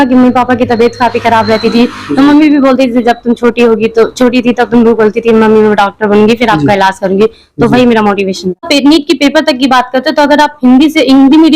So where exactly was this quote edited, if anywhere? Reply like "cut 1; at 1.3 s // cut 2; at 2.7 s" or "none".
cut 1; at 8.6 s